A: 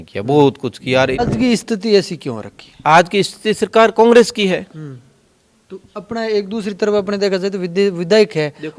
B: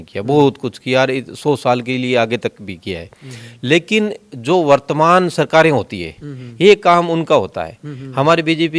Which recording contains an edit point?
A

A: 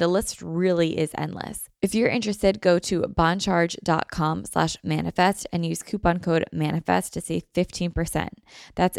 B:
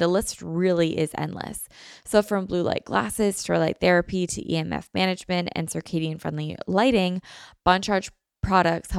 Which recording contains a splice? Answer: A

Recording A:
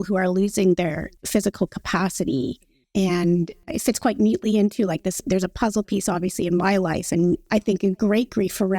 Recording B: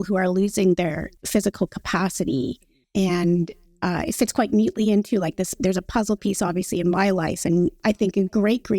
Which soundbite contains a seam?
A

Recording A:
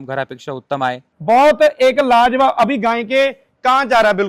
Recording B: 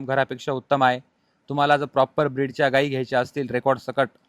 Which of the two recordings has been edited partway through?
A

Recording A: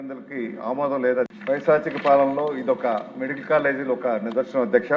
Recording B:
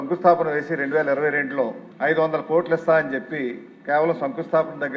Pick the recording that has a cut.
A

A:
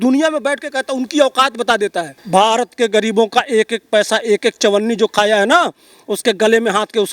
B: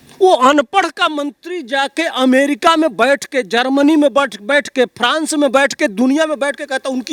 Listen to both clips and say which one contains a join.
A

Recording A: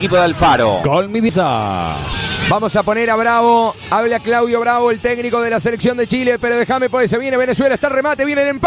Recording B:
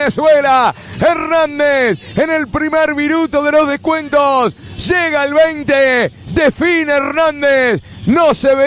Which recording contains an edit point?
A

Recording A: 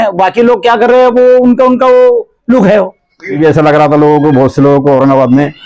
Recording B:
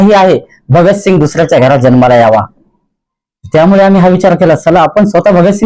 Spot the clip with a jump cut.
A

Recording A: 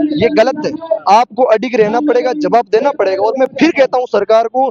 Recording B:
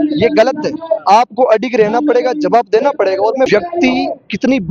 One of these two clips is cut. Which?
B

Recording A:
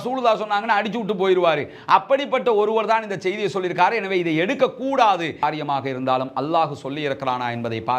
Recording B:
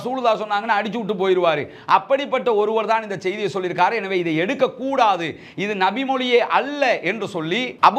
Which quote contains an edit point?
A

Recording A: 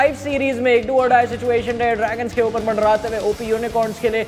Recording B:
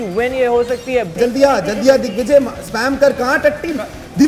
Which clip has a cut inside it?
B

